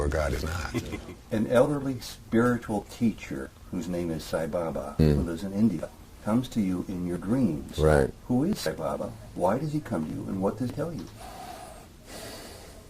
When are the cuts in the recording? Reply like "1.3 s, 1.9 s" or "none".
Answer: 1.1 s